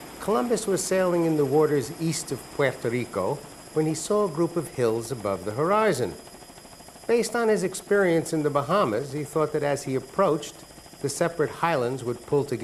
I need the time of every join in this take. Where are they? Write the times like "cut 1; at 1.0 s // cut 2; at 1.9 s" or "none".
none